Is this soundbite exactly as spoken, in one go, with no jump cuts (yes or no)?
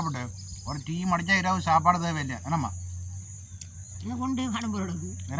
yes